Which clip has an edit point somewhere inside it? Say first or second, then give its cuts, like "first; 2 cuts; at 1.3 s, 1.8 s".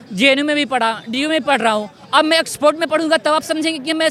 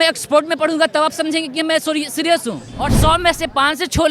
second; 1 cut; at 3.0 s